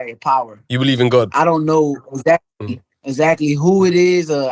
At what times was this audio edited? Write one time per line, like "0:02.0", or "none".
none

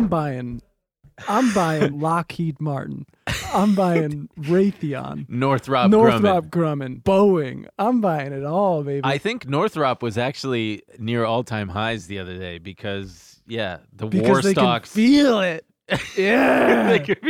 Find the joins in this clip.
0:02.0
0:06.9

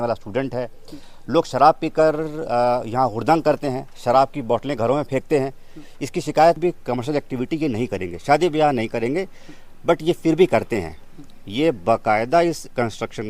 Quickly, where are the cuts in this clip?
0:06.6

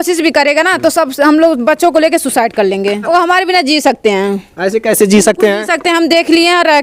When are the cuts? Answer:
0:03.0

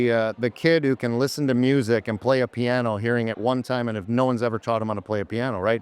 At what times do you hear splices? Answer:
none

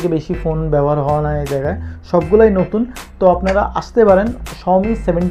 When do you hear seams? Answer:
none

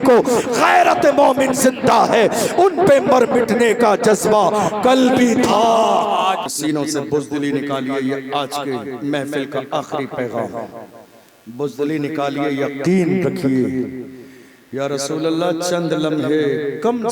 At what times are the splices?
0:06.5

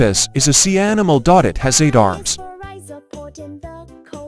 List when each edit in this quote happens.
none

